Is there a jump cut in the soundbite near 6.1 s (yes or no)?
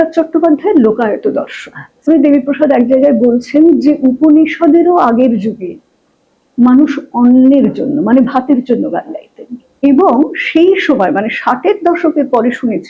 no